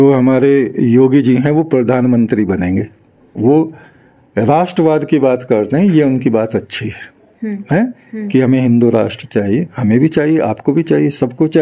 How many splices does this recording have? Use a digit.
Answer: 1